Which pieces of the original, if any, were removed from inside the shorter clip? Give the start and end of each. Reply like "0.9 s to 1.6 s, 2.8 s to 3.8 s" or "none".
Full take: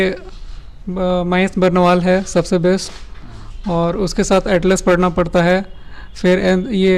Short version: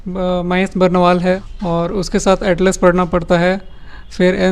2.2 s to 3.5 s